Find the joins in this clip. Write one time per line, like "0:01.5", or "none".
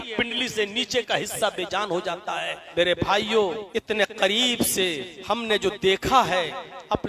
0:02.6
0:03.6
0:05.1